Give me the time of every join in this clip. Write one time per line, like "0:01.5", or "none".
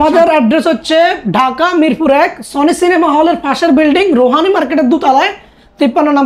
none